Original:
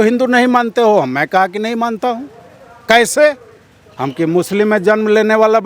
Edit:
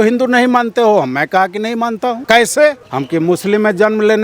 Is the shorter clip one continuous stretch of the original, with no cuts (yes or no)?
no